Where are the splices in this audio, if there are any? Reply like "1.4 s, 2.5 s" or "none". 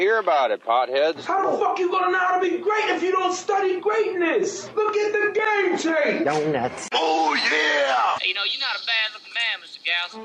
4.9 s